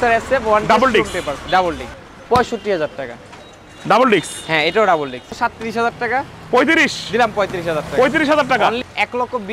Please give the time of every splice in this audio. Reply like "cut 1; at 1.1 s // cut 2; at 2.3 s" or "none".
cut 1; at 2.0 s // cut 2; at 5.3 s // cut 3; at 8.8 s